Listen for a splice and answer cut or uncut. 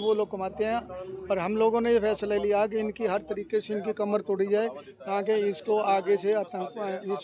uncut